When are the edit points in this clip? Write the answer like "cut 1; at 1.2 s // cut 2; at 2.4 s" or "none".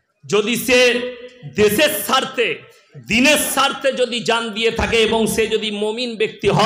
none